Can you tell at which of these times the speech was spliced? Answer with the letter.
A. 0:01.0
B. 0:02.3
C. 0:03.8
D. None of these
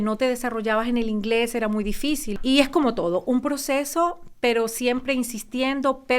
B